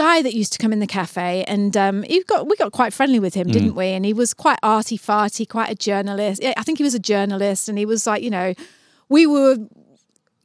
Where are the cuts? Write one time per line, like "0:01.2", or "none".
none